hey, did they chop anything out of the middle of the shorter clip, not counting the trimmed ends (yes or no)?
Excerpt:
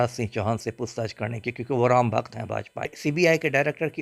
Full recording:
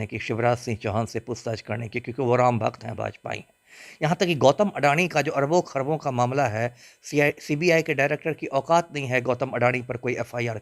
yes